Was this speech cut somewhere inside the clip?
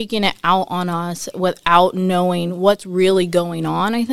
no; 0 cuts

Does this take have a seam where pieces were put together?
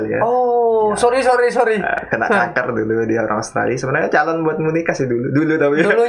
no; 0 cuts

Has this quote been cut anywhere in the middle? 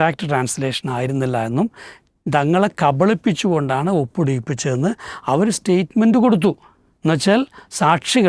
no; 0 cuts

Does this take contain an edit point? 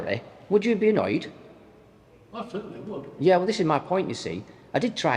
no; 0 cuts

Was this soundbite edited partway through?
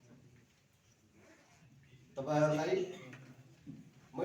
no; 0 cuts

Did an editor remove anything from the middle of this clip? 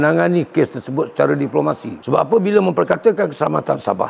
yes; 1 cut; at 2.0 s

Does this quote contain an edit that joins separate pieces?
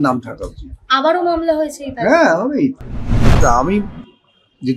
yes; 1 cut; at 3.3 s

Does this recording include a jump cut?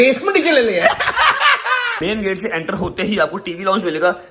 yes; 1 cut; at 1.9 s

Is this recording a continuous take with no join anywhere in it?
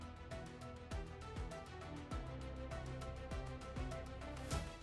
yes; 0 cuts

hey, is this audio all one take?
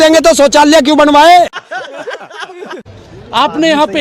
no; 2 cuts; at 1.6 s, 2.9 s

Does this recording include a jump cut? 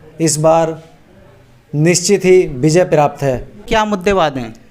yes; 1 cut; at 3.6 s

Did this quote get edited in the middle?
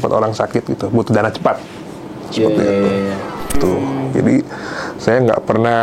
yes; 1 cut; at 3.6 s

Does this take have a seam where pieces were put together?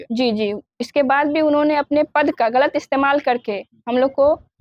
no; 0 cuts

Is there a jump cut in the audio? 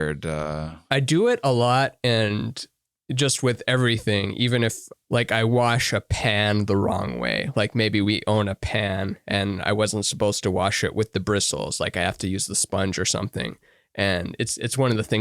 yes; 2 cuts; at 0.8 s, 4.9 s

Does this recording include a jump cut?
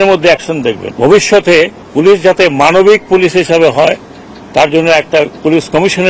yes; 2 cuts; at 0.9 s, 1.8 s

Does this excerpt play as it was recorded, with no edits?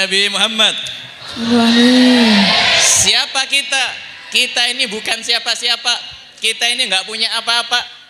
yes; 0 cuts

